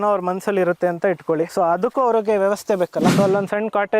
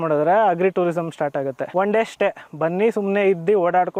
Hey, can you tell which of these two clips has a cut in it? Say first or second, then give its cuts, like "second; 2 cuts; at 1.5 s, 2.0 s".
first; 2 cuts; at 1.5 s, 3.1 s